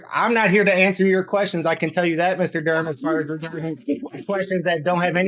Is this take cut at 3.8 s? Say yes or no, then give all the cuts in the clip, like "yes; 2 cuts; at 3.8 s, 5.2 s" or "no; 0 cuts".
no; 0 cuts